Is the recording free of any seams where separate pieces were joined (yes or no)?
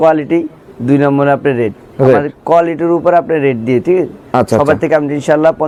yes